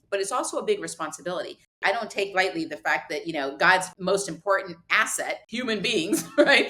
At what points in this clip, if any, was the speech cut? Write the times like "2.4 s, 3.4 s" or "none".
1.8 s, 3.9 s, 5.4 s